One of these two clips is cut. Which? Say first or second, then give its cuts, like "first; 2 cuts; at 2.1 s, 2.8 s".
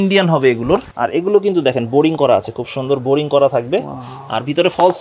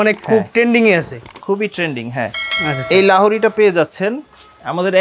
first; 1 cut; at 1.0 s